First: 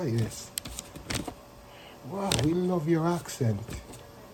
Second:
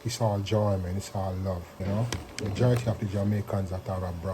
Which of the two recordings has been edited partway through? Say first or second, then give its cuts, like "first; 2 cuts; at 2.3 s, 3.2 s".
second; 1 cut; at 1.7 s